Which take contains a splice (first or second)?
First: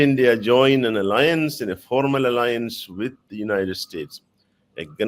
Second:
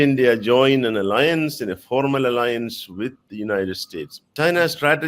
second